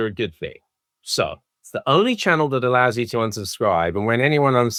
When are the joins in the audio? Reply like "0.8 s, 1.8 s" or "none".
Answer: none